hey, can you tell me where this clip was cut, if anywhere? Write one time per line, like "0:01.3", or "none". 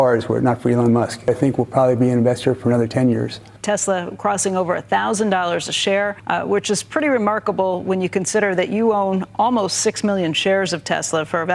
0:01.3
0:03.5
0:06.2